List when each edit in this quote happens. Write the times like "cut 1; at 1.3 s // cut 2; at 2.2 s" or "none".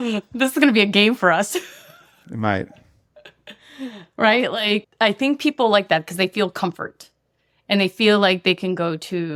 none

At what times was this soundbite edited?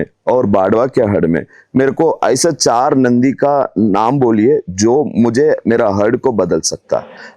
none

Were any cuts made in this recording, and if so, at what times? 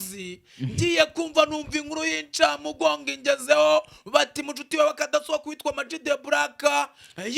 none

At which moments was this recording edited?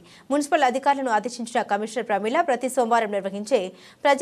none

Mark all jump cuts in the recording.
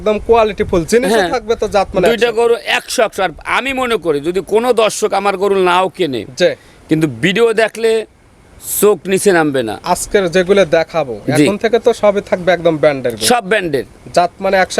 none

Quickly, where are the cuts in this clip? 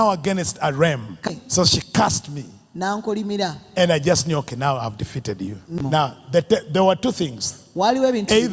cut 1; at 1.3 s // cut 2; at 5.8 s

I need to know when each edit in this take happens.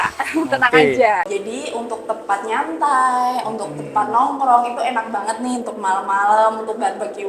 cut 1; at 1.3 s

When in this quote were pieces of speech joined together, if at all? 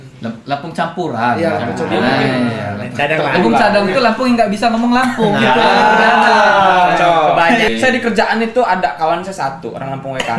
cut 1; at 7.7 s

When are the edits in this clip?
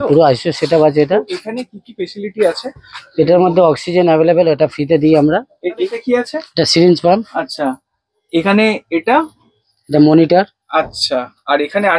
none

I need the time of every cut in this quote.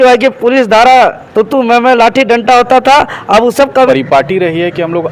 cut 1; at 3.9 s

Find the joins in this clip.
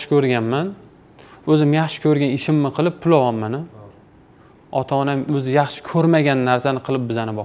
cut 1; at 5.3 s

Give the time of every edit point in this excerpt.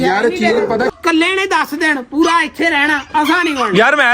cut 1; at 0.9 s

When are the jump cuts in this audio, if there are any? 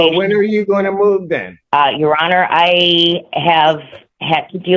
cut 1; at 1.5 s

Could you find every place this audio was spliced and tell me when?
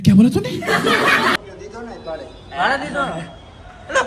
cut 1; at 1.6 s

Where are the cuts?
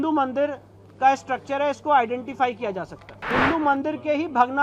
cut 1; at 3.1 s

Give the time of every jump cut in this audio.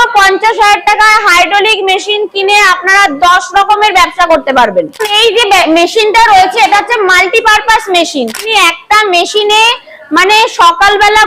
cut 1; at 5.1 s // cut 2; at 8.4 s

